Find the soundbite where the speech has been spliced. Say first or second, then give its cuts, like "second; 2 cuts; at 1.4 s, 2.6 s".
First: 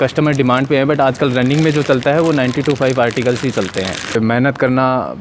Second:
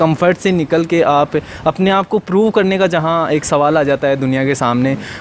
first; 1 cut; at 4.2 s